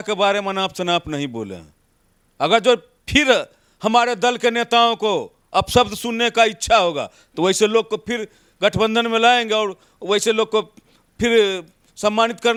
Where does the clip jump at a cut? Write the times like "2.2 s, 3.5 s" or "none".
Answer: none